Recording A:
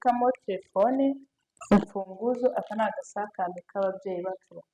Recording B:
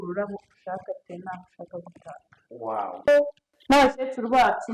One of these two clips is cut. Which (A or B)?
B